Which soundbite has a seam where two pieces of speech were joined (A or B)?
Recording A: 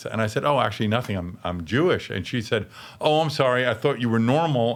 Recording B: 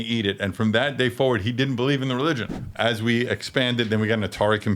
B